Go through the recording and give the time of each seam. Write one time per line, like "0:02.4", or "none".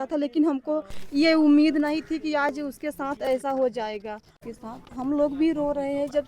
0:04.3